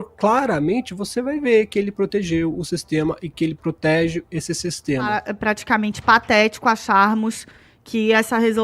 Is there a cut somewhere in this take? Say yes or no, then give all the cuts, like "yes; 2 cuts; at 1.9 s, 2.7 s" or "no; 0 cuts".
yes; 1 cut; at 5.3 s